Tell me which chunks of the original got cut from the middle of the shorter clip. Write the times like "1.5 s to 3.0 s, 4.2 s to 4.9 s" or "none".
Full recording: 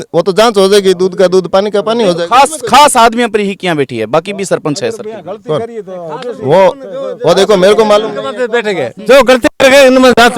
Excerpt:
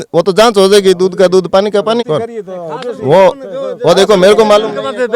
2.0 s to 5.4 s